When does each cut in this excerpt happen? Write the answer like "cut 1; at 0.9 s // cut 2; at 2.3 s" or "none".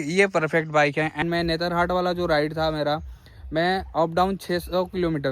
cut 1; at 1.2 s